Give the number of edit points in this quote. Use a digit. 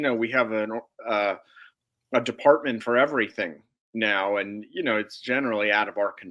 0